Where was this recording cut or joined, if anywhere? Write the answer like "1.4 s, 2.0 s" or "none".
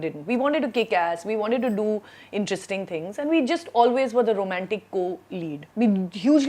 5.6 s